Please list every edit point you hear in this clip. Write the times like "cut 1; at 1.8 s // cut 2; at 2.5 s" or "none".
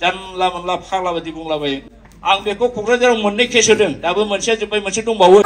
cut 1; at 1.8 s